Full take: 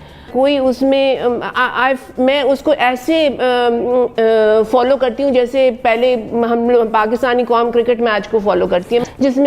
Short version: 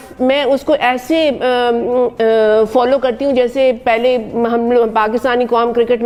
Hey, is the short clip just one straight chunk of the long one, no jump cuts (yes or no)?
yes